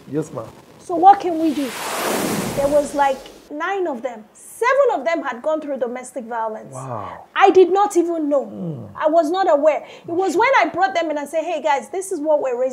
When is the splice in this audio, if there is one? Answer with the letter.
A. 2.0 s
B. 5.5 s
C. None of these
A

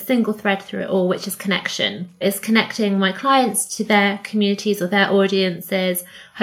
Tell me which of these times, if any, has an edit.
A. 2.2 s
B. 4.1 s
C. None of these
A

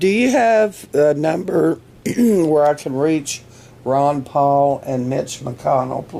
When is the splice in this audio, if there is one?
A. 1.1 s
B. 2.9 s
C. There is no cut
A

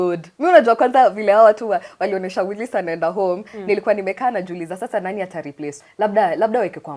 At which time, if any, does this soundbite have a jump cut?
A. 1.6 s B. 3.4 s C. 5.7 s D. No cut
C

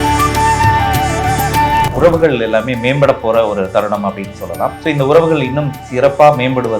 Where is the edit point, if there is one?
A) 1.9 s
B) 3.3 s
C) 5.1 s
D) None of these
A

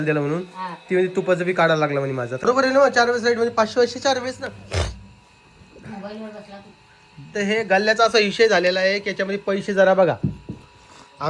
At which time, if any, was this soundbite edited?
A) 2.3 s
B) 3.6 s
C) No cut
A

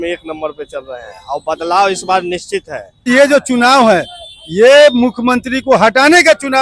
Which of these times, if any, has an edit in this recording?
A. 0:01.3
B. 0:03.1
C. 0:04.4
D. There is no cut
B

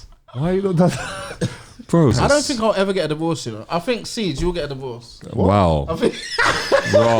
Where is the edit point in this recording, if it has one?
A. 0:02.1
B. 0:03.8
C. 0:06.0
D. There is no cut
A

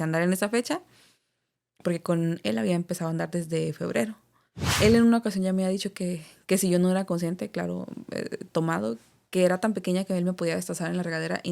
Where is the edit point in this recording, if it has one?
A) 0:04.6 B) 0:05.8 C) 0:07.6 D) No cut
A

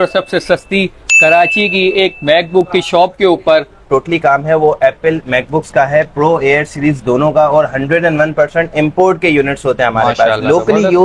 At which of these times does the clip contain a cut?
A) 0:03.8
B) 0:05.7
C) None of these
A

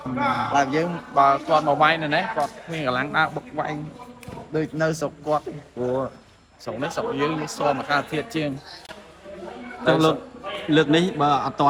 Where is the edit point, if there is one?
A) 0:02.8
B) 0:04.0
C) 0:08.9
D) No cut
D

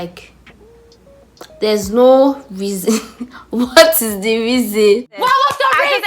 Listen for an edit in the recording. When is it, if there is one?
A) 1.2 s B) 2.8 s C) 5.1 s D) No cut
C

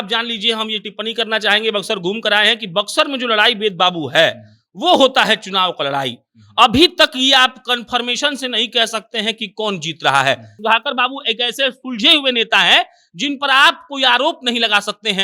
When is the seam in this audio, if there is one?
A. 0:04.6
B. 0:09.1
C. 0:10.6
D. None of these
C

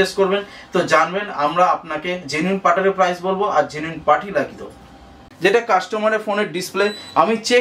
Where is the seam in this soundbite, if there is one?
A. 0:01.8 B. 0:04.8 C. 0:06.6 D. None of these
B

